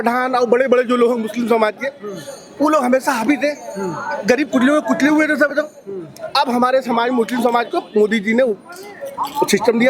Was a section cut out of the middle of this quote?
no; 0 cuts

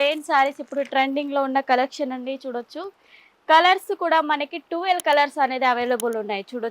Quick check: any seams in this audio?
no; 0 cuts

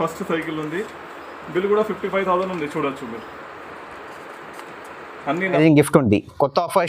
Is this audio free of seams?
no; 1 cut; at 5.6 s

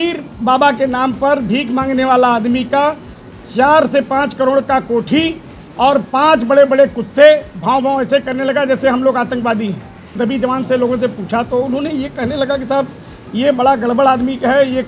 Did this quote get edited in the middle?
yes; 1 cut; at 10.1 s

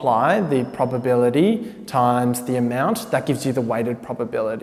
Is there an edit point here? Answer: no; 0 cuts

